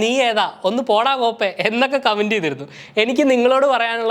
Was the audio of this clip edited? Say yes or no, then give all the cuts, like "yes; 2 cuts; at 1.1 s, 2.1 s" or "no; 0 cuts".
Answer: no; 0 cuts